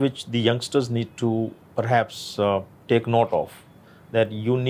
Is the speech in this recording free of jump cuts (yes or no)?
yes